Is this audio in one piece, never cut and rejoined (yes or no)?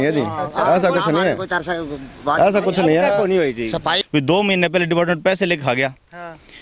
no